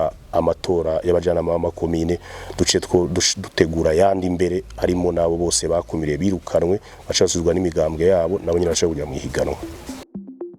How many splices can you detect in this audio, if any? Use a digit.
1